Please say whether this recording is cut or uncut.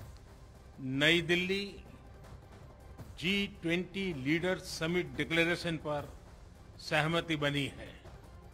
cut